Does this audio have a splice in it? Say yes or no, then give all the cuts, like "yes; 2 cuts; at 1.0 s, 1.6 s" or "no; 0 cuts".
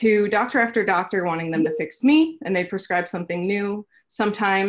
no; 0 cuts